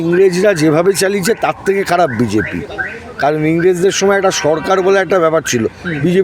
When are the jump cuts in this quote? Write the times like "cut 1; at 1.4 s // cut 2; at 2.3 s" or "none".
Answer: none